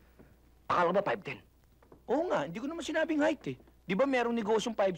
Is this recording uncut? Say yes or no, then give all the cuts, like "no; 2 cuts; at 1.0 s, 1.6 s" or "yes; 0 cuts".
yes; 0 cuts